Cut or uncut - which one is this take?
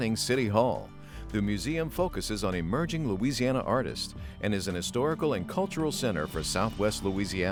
uncut